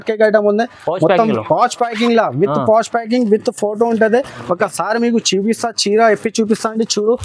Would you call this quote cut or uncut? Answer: uncut